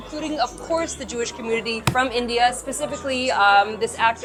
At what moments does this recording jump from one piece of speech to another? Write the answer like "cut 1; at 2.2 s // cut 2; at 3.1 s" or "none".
none